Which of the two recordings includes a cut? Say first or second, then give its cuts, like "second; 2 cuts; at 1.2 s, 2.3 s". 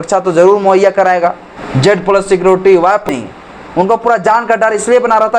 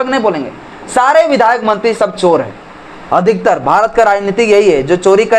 first; 2 cuts; at 1.5 s, 3.1 s